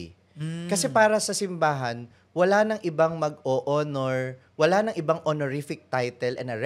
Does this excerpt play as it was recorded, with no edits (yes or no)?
yes